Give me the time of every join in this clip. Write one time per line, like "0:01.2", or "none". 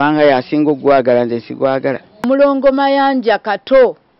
0:02.1